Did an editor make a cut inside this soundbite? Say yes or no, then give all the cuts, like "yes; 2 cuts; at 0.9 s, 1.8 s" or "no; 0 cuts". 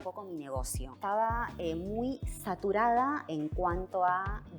yes; 2 cuts; at 0.9 s, 3.3 s